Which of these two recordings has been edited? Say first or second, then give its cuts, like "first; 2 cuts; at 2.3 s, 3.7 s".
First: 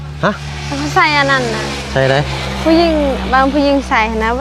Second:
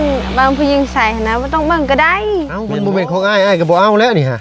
second; 1 cut; at 2.6 s